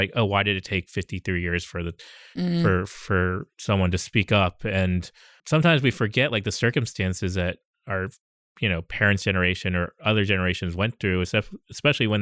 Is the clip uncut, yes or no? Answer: no